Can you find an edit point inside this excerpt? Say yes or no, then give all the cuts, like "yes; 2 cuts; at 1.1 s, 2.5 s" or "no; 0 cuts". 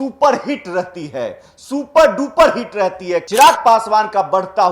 yes; 1 cut; at 3.3 s